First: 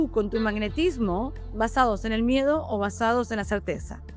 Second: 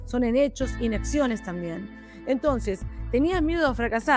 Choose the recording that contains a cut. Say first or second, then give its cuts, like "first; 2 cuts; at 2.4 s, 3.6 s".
first; 1 cut; at 1.5 s